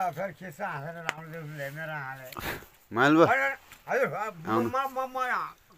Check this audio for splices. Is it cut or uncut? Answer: uncut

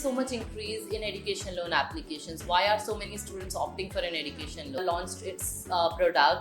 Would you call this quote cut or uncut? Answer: cut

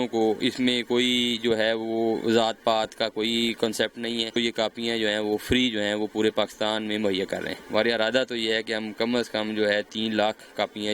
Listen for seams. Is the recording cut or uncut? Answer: cut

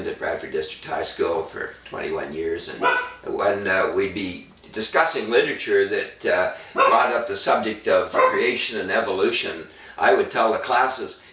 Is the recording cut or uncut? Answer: uncut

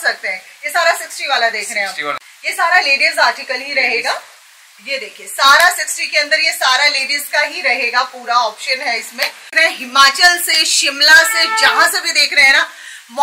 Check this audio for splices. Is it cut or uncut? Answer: cut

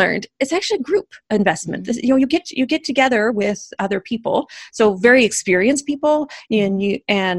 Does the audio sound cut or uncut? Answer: uncut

